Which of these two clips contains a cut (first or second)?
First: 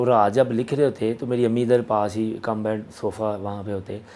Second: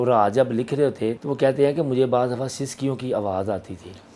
second